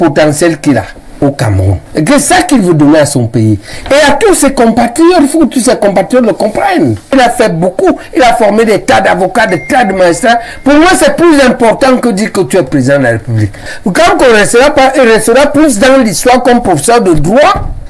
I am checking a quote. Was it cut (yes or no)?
yes